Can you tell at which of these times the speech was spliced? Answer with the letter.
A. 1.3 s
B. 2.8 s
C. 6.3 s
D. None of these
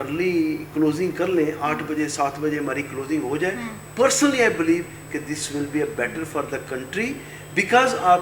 D